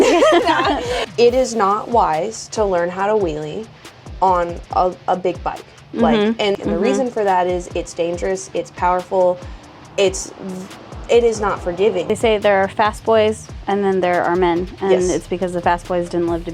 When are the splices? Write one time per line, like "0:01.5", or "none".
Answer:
0:01.0
0:06.6
0:12.1